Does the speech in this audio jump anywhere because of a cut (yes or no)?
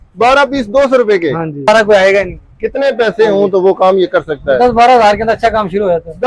yes